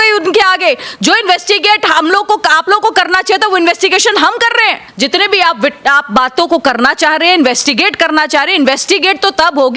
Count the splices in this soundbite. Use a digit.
1